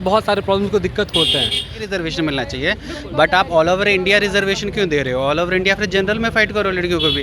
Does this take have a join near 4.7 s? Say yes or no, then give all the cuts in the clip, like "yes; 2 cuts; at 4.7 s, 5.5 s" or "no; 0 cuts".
no; 1 cut; at 1.9 s